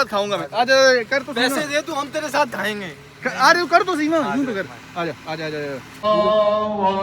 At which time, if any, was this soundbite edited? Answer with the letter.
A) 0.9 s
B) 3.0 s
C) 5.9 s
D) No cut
C